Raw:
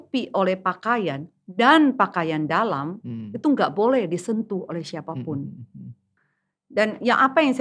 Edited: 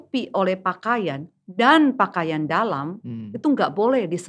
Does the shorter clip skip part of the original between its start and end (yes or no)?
no